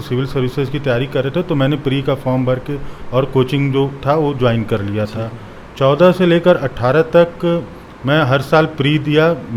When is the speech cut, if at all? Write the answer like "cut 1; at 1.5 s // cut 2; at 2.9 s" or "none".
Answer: none